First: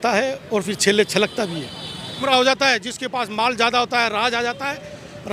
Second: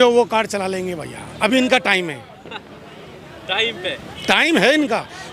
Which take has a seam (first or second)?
first